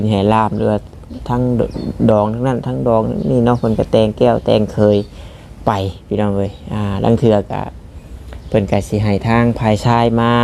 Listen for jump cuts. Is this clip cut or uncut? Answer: uncut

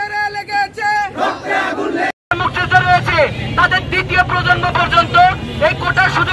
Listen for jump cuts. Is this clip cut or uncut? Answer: cut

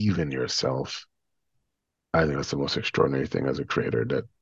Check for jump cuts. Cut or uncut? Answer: uncut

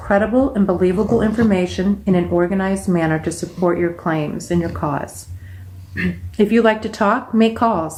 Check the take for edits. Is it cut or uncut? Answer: uncut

